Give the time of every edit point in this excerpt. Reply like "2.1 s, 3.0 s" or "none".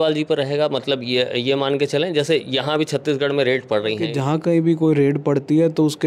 4.1 s